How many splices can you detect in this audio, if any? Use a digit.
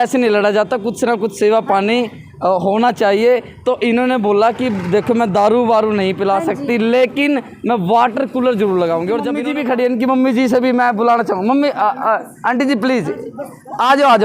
1